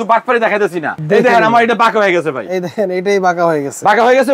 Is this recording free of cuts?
no; 1 cut; at 1.0 s

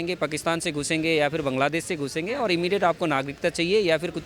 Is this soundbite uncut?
yes; 0 cuts

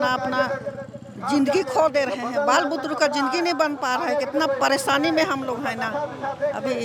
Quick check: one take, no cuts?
yes; 0 cuts

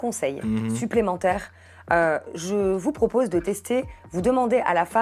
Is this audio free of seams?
yes; 0 cuts

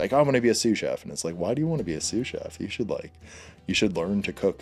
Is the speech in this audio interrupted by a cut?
no; 0 cuts

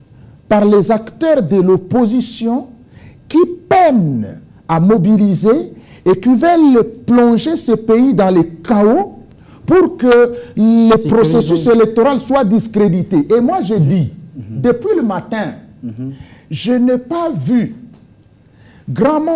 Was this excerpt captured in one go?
yes; 0 cuts

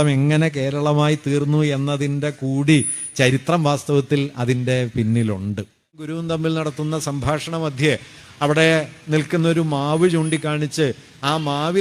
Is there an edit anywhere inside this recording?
yes; 1 cut; at 6.1 s

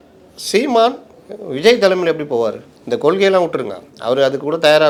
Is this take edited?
no; 0 cuts

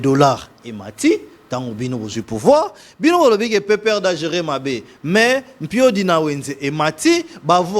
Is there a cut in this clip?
no; 0 cuts

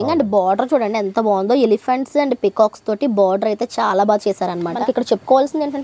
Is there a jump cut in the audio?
yes; 1 cut; at 4.8 s

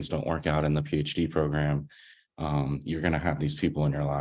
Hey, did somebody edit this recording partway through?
no; 0 cuts

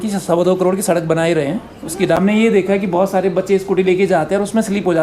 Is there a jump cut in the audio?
yes; 1 cut; at 2.2 s

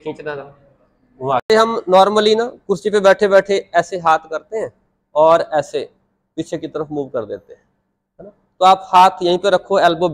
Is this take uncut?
no; 1 cut; at 1.4 s

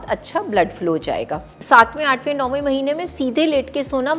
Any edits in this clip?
yes; 1 cut; at 1.6 s

